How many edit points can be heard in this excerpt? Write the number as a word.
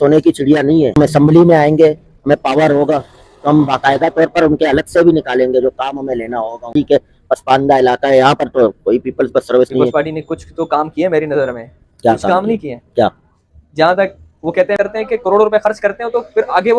three